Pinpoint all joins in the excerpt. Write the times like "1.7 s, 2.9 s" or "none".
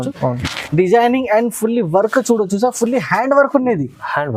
none